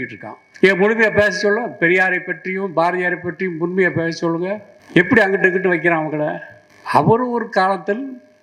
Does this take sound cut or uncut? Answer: uncut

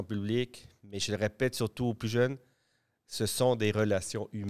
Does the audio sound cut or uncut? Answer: uncut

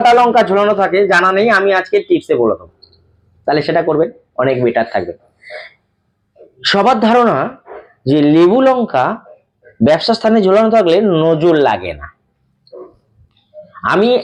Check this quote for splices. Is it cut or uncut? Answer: uncut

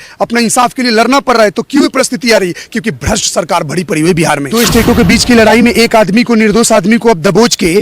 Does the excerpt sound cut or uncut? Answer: cut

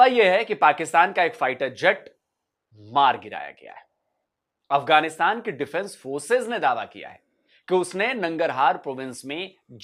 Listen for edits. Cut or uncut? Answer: uncut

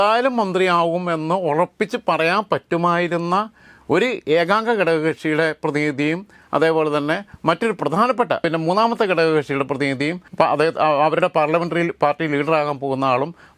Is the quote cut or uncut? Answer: cut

